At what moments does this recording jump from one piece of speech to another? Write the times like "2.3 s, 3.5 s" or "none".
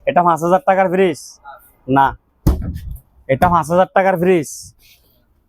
none

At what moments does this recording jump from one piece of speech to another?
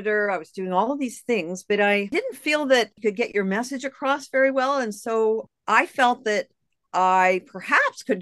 2.1 s

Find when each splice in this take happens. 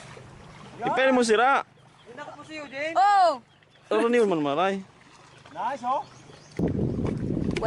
6.6 s

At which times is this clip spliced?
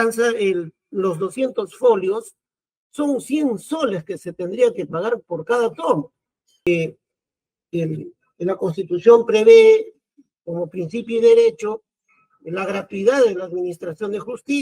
6.7 s

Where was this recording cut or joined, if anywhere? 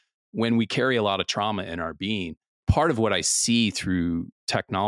2.6 s

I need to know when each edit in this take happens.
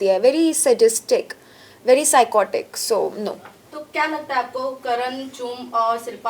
none

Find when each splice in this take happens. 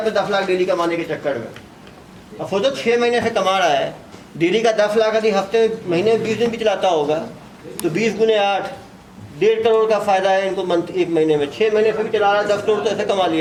none

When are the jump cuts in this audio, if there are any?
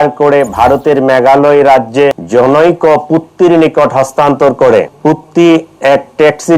2.2 s, 4.9 s

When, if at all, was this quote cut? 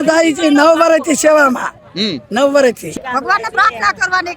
2.8 s

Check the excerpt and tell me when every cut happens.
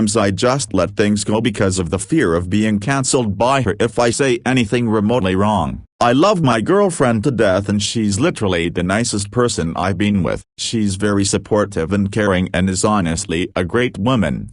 5.8 s, 10.5 s

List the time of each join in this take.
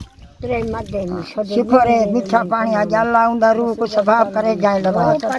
none

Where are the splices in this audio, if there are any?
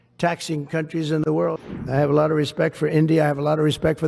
1.6 s

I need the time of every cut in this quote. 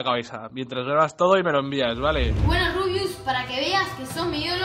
2.4 s

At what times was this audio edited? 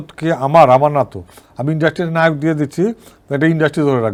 none

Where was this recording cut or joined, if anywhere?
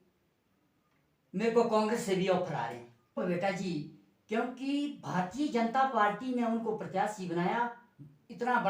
3.2 s

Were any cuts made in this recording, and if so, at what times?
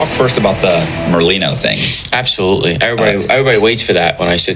none

